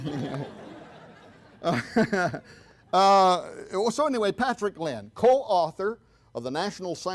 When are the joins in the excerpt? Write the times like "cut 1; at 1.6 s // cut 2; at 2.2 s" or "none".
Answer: cut 1; at 2.4 s